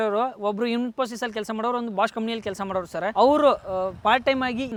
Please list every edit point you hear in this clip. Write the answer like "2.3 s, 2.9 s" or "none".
none

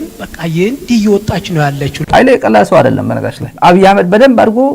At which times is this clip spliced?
3.5 s

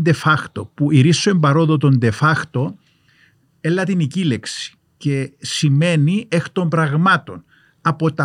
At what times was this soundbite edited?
none

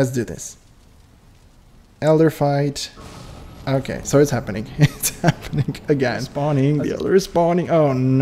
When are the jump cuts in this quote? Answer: 6.3 s

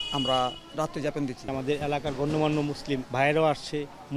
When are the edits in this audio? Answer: 1.4 s, 3.1 s

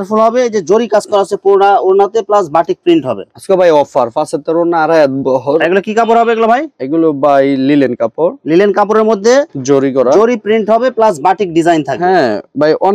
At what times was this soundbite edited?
none

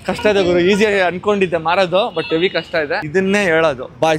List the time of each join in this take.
3.0 s

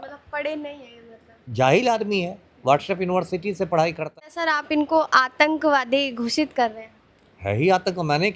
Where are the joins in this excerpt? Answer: 4.0 s

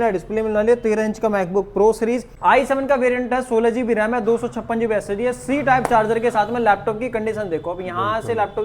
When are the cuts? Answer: 2.3 s

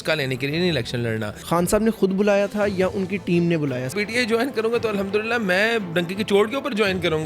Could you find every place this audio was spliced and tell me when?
1.3 s, 3.9 s

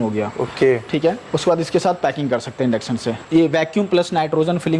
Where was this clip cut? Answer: 1.3 s, 3.1 s

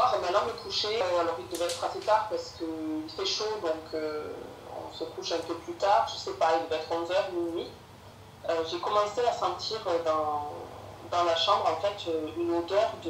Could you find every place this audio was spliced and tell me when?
1.0 s

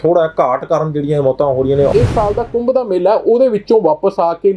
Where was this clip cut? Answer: 1.9 s

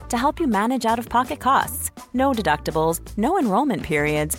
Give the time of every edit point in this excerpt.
none

